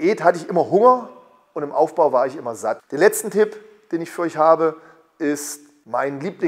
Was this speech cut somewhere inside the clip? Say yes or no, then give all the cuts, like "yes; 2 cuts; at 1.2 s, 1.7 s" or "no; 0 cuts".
yes; 1 cut; at 2.9 s